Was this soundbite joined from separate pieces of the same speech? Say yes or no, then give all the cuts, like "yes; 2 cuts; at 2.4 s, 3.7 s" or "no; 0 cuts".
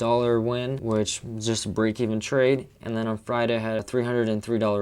yes; 2 cuts; at 0.8 s, 3.9 s